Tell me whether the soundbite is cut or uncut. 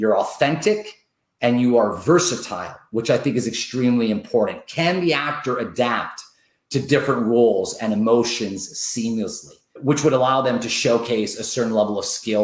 cut